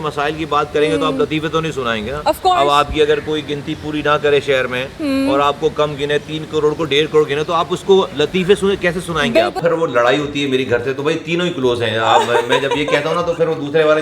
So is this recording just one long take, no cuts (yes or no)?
no